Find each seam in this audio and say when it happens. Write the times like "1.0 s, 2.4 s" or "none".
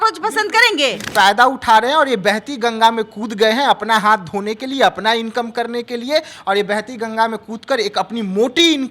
1.0 s